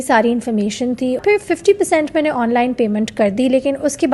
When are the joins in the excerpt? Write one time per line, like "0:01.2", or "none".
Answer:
0:01.2